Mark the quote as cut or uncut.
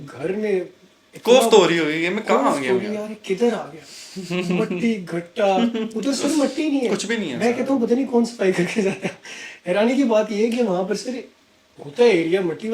uncut